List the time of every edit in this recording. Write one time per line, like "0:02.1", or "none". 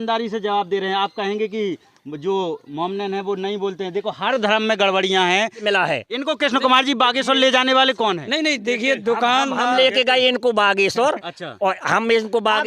0:05.6

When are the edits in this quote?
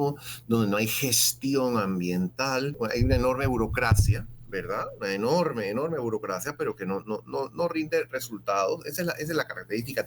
0:02.7

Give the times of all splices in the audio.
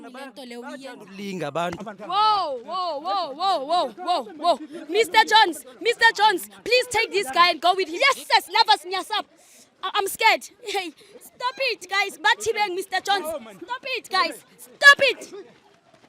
0:07.9

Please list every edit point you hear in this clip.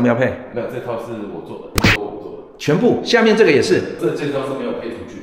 0:01.8
0:04.0

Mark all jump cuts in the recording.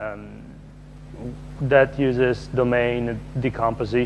0:02.4

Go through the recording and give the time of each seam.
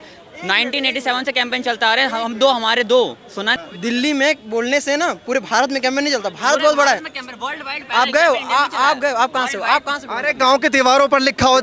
0:03.5

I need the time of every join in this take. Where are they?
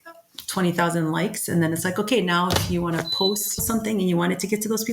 0:03.6

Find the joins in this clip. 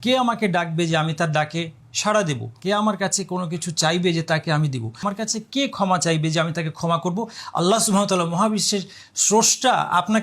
0:02.5
0:05.0

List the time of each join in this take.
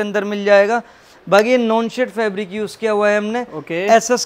none

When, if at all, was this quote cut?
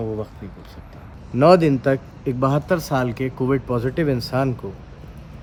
none

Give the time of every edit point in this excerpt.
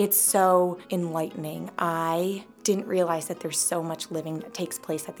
0:00.8
0:02.5

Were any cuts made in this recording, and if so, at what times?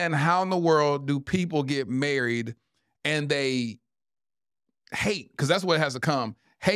none

